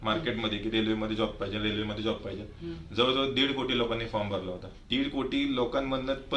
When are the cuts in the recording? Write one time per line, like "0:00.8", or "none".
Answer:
0:04.7